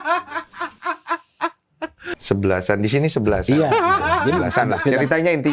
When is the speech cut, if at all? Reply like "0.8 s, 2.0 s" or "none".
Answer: 2.1 s